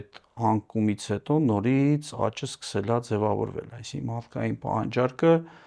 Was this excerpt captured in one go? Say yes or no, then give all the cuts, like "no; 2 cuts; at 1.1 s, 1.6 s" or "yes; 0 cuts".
yes; 0 cuts